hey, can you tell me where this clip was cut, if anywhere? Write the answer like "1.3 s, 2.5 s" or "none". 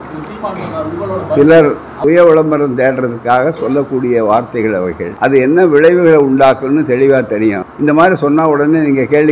1.9 s, 5.1 s, 7.7 s